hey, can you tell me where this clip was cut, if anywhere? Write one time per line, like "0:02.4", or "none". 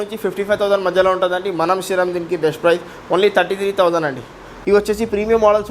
0:04.4